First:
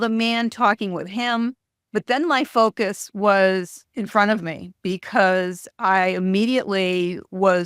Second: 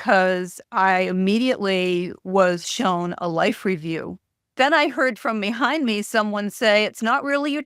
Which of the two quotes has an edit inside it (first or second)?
second